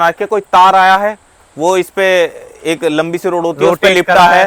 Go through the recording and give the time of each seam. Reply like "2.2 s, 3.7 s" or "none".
none